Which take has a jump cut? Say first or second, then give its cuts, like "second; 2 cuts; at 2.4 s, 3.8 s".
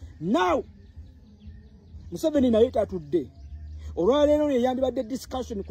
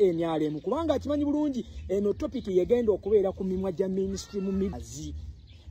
second; 1 cut; at 4.7 s